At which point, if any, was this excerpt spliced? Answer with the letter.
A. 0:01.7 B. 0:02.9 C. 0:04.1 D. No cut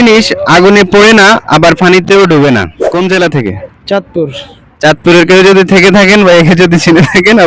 B